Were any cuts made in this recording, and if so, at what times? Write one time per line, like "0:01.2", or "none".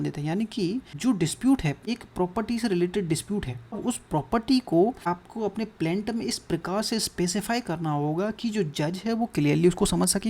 0:00.9
0:01.8
0:03.8
0:05.0